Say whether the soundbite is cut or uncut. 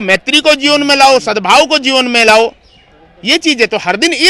uncut